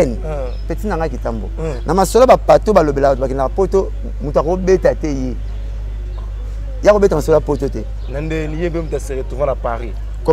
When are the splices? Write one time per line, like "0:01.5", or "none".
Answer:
none

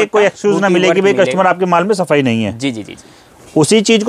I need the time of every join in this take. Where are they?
none

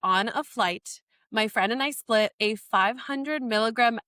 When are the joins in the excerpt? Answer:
none

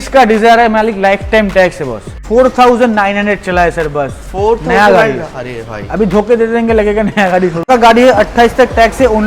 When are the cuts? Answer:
0:02.1
0:07.7

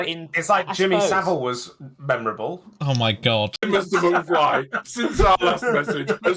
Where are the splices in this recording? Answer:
0:03.6

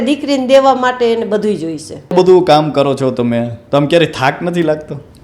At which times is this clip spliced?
0:02.1

